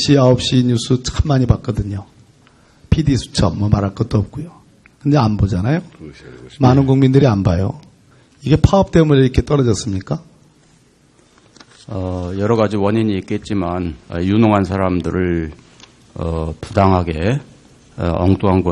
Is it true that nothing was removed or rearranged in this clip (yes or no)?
no